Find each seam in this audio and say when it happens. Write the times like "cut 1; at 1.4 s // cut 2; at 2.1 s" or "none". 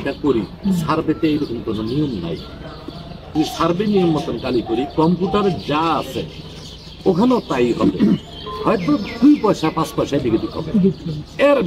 cut 1; at 3.4 s